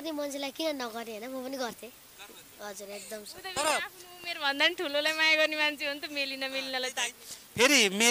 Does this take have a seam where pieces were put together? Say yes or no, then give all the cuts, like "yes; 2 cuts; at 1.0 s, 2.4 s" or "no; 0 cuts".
no; 0 cuts